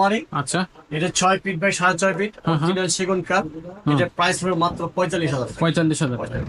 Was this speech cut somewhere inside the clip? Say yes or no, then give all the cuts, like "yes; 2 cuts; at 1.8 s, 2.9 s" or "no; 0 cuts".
no; 0 cuts